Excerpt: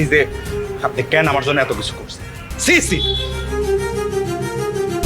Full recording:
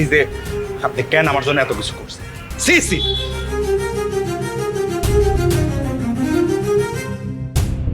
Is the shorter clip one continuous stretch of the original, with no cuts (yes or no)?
yes